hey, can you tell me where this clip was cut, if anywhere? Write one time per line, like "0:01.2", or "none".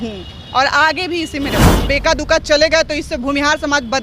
0:01.9